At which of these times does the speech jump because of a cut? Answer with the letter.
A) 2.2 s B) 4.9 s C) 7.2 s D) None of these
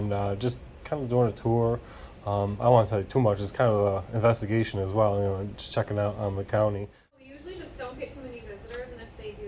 C